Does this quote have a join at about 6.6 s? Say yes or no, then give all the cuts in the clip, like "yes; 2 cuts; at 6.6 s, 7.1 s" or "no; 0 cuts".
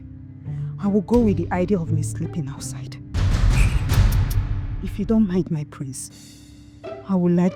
no; 2 cuts; at 3.0 s, 4.6 s